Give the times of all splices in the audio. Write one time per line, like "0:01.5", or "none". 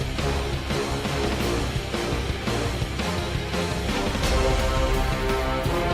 none